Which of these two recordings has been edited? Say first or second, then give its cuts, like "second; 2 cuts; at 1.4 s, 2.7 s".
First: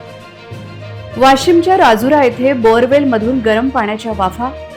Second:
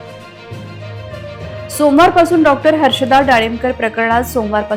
first; 1 cut; at 1.1 s